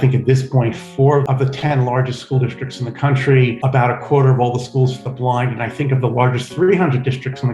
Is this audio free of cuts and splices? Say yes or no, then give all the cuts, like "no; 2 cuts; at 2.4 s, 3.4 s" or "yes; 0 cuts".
no; 1 cut; at 1.2 s